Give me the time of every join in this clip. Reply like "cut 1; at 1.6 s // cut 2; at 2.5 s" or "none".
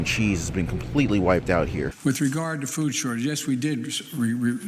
cut 1; at 1.9 s